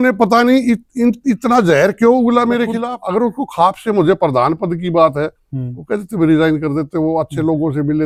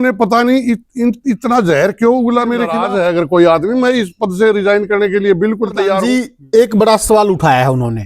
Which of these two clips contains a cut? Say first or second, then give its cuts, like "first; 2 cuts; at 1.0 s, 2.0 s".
second; 2 cuts; at 2.9 s, 6.0 s